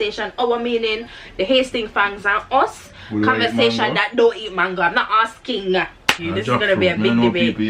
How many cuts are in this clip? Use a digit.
1